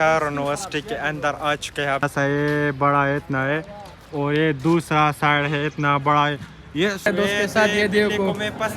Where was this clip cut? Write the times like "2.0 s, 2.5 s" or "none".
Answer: 2.0 s, 7.0 s